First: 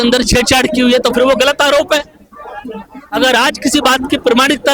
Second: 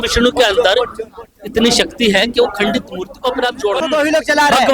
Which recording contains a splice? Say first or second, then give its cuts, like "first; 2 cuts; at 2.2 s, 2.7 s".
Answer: second; 1 cut; at 3.8 s